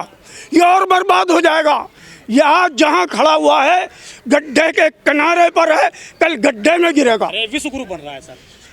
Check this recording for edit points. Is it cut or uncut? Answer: uncut